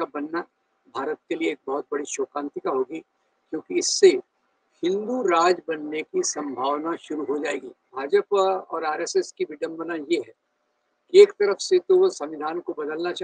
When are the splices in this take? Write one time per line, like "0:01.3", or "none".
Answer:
0:07.9